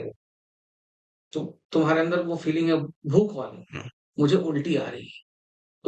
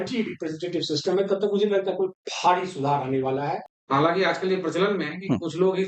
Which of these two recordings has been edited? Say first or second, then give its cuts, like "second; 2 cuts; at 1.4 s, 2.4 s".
second; 1 cut; at 3.7 s